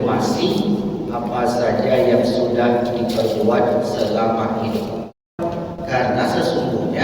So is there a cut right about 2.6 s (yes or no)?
no